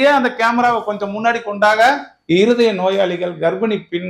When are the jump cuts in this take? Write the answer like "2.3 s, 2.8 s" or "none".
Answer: 2.1 s